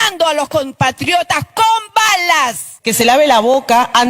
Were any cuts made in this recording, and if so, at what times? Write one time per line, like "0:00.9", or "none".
0:02.7